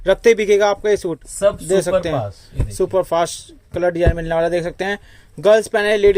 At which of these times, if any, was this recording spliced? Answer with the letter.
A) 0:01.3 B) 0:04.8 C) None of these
A